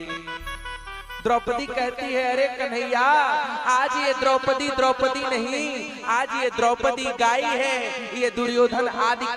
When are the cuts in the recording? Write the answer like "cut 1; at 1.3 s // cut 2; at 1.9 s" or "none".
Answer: none

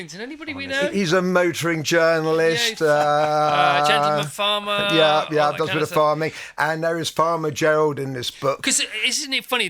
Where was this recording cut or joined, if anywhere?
none

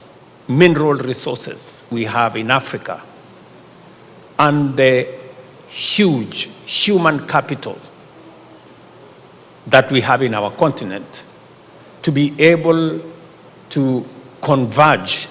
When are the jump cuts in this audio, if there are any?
cut 1; at 1.8 s

